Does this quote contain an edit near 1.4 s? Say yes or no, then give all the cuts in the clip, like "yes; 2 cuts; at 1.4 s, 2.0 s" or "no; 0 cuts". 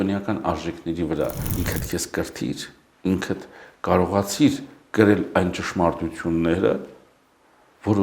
yes; 1 cut; at 1.4 s